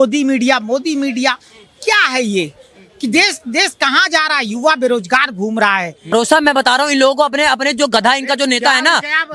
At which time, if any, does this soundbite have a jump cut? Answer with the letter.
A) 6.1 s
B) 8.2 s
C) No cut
A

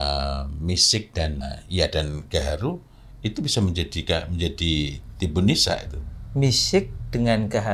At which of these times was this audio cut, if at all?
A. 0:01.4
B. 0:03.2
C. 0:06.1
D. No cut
A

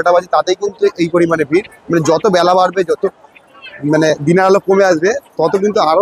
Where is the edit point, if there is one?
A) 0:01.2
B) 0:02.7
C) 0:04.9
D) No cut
D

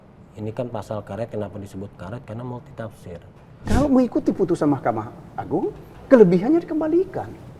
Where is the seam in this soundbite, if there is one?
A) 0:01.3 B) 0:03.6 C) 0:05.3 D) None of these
B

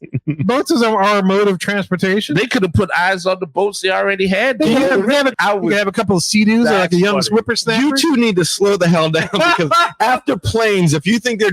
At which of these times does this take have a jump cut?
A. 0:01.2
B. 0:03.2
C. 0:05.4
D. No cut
C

